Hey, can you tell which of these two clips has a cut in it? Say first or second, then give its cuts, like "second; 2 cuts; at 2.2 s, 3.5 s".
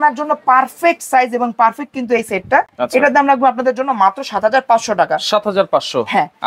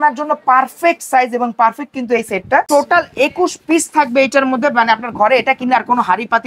second; 1 cut; at 2.7 s